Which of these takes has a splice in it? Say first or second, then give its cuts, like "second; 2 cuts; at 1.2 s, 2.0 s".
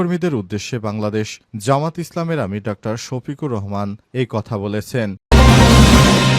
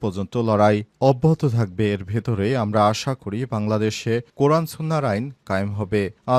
first; 1 cut; at 5.2 s